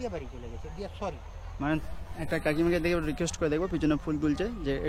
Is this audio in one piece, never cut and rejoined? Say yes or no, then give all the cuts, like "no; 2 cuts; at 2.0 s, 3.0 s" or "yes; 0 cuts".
no; 1 cut; at 1.8 s